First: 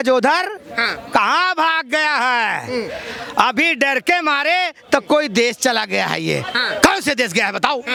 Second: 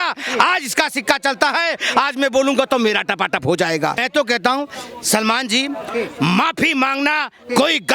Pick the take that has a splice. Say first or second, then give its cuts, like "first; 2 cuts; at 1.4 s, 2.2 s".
second; 1 cut; at 4.0 s